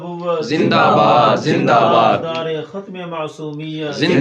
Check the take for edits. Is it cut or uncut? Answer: uncut